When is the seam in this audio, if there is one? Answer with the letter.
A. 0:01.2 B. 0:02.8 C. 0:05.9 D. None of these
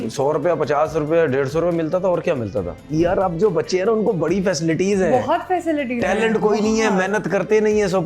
B